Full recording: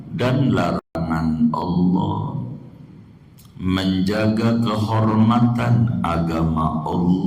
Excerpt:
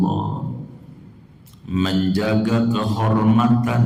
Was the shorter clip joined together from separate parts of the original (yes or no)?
no